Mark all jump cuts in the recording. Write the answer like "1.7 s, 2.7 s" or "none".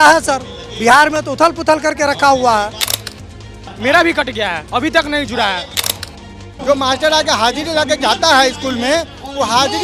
3.4 s, 5.9 s